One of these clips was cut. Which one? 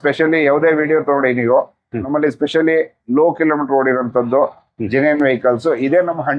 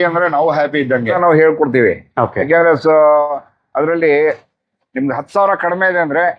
second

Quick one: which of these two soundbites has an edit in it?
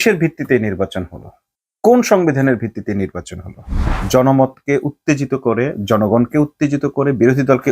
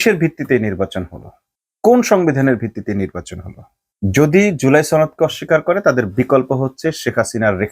first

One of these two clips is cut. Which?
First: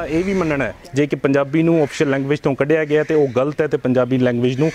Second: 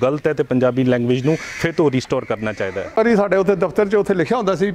second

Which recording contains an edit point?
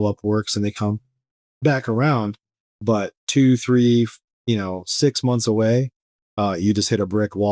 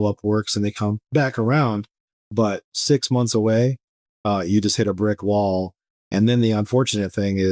second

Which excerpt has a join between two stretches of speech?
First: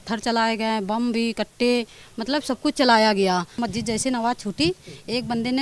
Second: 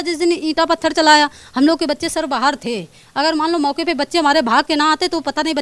first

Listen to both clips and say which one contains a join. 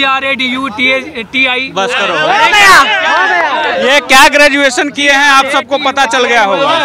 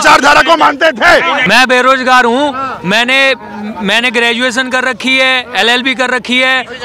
second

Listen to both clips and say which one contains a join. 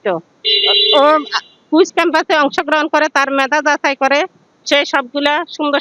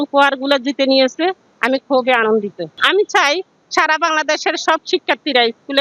second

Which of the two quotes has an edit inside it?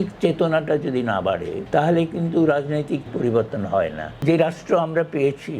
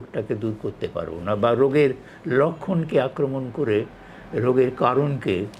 first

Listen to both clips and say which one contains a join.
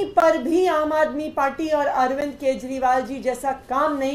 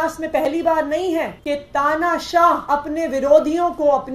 second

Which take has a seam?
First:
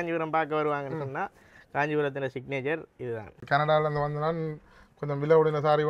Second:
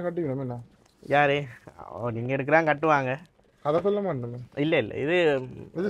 first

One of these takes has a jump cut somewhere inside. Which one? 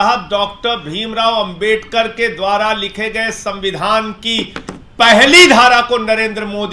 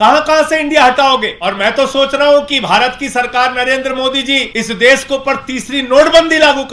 second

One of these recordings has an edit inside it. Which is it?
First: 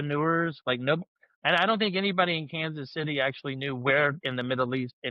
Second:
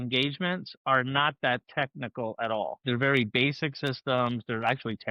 second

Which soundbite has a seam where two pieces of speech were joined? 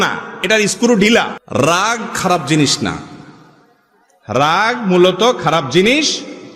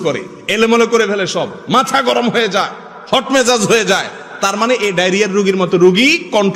first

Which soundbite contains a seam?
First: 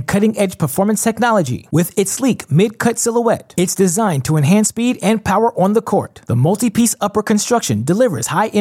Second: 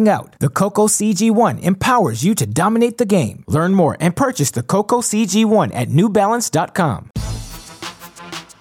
second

